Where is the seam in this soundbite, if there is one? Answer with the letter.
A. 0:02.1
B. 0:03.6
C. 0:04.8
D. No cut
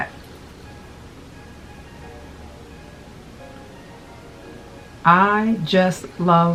D